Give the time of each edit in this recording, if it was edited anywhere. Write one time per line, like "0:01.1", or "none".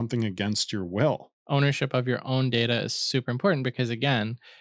0:01.3

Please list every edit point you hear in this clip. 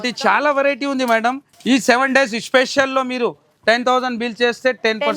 0:01.5

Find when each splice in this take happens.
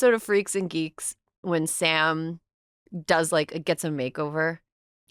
none

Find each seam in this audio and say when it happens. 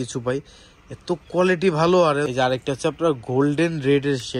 0:02.3

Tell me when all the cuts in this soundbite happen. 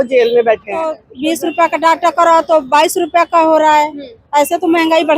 0:01.0

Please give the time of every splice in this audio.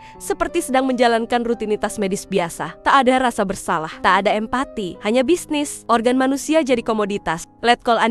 0:02.7
0:03.9
0:04.9
0:05.8

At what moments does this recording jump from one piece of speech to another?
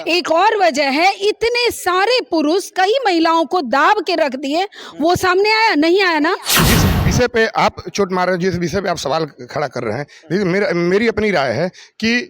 0:06.6

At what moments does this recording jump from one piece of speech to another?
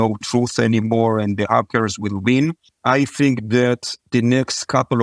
0:02.7
0:03.9

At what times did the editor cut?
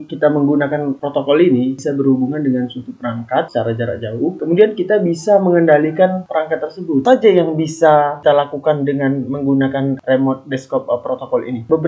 0:01.8
0:03.5
0:07.0

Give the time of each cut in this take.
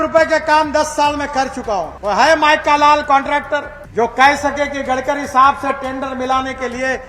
0:01.9
0:03.8

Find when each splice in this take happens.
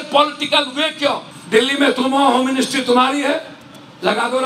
0:01.3

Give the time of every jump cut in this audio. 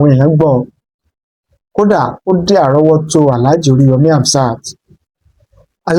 none

